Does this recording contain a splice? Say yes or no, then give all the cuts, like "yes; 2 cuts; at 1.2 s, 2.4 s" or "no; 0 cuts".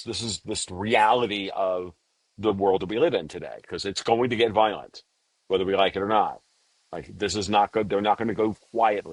no; 0 cuts